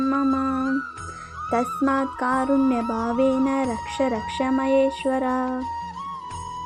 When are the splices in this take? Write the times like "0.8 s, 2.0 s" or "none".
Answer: 5.6 s